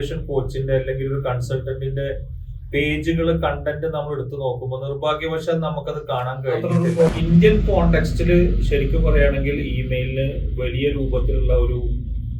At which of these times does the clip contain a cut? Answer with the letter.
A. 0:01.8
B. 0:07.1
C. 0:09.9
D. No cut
B